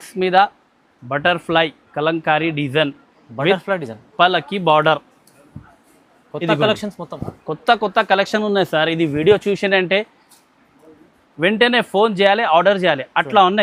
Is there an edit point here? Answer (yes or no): no